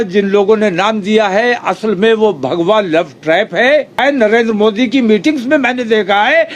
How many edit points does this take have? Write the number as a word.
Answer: one